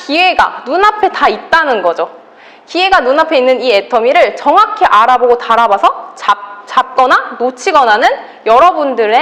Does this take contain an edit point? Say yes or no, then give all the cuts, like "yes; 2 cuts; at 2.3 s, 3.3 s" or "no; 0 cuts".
no; 0 cuts